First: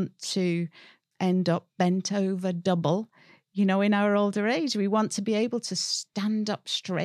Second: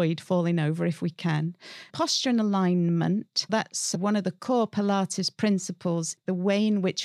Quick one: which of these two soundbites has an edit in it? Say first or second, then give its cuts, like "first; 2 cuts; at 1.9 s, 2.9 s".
second; 2 cuts; at 3.5 s, 6.1 s